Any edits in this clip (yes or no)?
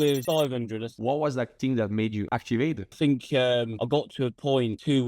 yes